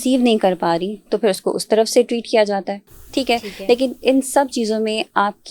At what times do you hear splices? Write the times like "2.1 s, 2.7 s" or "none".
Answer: none